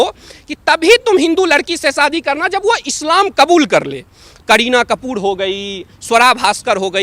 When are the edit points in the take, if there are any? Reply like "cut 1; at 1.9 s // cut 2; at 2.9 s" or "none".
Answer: cut 1; at 4.3 s